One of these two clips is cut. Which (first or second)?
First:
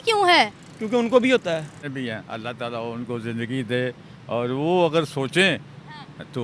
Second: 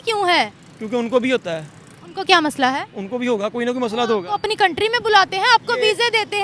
first